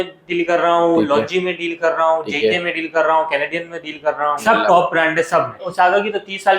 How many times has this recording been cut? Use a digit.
2